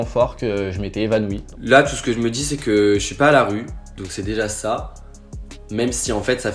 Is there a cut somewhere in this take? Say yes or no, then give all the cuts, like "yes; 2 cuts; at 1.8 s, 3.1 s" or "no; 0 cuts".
yes; 1 cut; at 1.5 s